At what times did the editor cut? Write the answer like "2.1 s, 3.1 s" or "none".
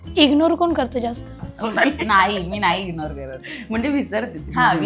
1.5 s